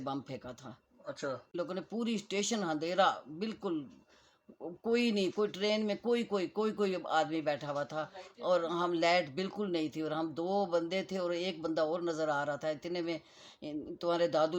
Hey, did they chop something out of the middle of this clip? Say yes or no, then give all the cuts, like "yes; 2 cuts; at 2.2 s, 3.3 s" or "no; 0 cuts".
yes; 1 cut; at 1.6 s